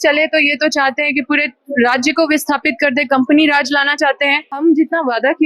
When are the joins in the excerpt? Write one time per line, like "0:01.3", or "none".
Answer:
0:04.4